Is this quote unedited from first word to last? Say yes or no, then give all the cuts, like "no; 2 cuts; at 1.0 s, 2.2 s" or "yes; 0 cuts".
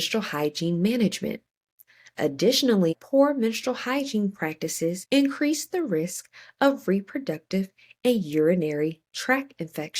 no; 2 cuts; at 2.9 s, 5.0 s